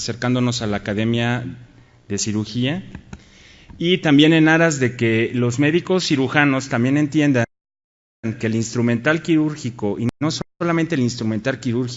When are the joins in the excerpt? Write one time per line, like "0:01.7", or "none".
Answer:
0:01.0